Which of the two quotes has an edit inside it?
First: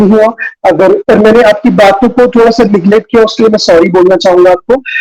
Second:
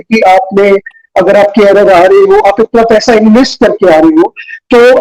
first; 1 cut; at 1.0 s

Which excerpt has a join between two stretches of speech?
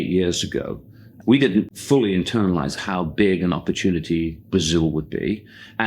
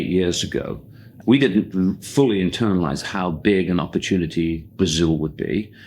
first; 1 cut; at 1.7 s

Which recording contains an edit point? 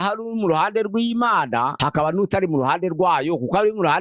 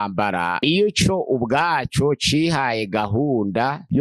first; 1 cut; at 1.8 s

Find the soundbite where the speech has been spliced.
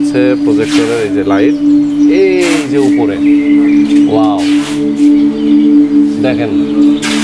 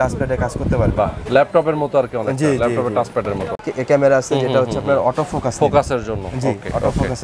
second; 1 cut; at 3.6 s

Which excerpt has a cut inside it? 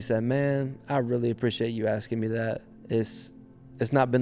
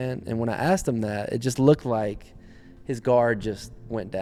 first; 1 cut; at 2.7 s

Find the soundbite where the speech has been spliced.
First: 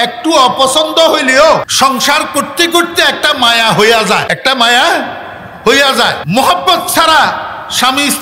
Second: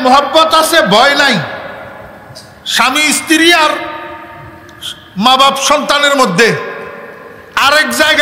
first; 3 cuts; at 1.7 s, 4.2 s, 6.2 s

